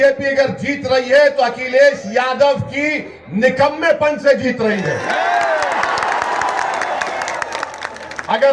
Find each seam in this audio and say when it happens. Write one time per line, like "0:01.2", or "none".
none